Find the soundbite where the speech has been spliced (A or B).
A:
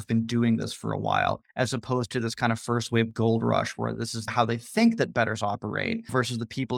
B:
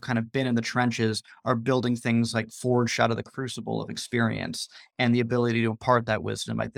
A